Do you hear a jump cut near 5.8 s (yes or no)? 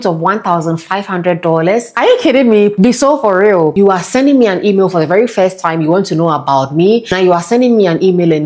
no